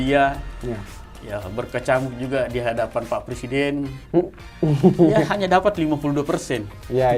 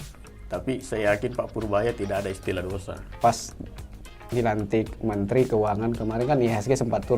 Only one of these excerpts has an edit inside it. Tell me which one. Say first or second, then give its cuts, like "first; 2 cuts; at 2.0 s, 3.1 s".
second; 1 cut; at 3.1 s